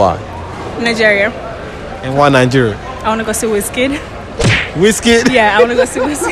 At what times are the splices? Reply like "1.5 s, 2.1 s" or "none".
1.6 s